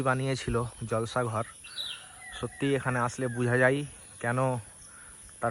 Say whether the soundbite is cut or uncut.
uncut